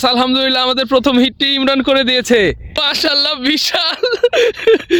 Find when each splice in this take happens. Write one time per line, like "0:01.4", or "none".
0:02.8